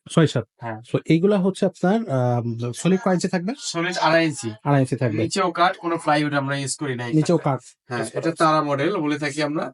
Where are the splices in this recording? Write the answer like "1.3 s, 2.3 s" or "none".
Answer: none